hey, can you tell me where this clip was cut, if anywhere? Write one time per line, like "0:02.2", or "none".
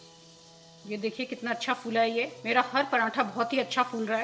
none